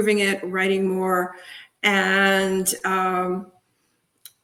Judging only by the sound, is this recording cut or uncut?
uncut